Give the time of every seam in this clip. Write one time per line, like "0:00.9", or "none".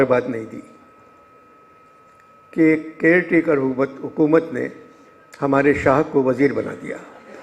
none

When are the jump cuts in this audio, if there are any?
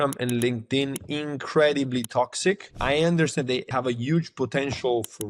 0:02.7
0:03.7

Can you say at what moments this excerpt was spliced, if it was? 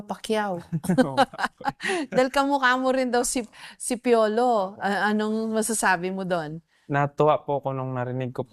none

